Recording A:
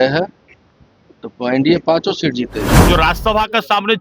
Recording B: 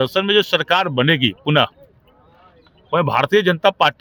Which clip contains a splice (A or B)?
A